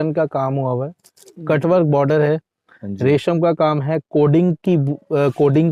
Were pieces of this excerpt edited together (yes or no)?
no